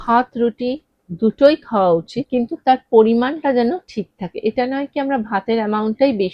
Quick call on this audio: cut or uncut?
cut